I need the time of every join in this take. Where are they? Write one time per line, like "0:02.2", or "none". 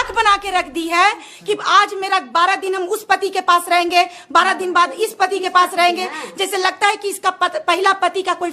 none

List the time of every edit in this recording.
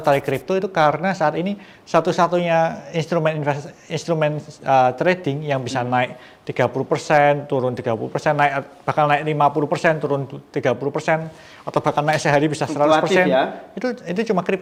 none

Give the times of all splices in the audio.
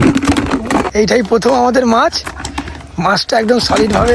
0:00.9

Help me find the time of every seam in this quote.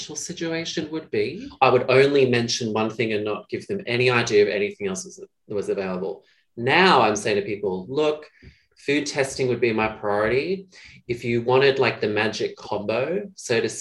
0:01.4
0:12.6

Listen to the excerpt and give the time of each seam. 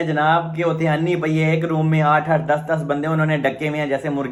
none

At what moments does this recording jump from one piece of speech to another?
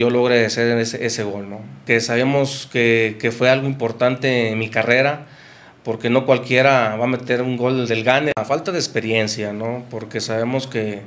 0:01.8
0:08.4

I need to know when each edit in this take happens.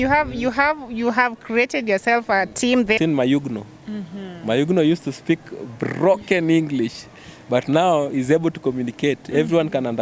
0:03.0

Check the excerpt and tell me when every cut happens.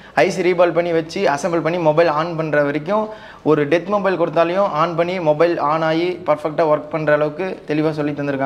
none

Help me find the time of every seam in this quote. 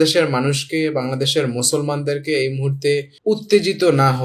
0:03.1

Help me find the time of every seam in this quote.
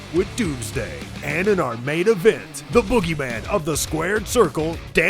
0:01.3

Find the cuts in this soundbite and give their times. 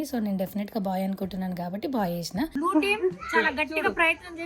0:02.5

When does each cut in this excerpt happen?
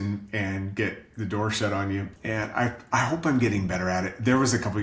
0:02.1

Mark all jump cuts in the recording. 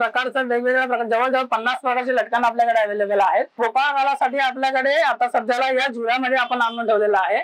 0:03.6

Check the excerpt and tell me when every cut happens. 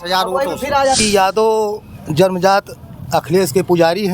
0:01.0

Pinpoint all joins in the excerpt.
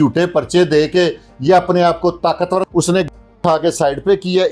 0:02.7

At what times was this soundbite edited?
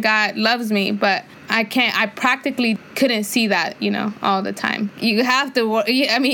0:01.4
0:02.8
0:04.9

